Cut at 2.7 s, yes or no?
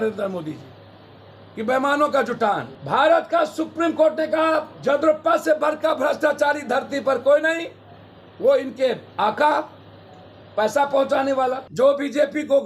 yes